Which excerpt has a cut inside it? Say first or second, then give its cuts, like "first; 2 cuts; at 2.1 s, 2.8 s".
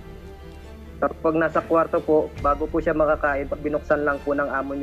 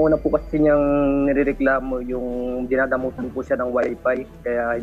first; 1 cut; at 1.0 s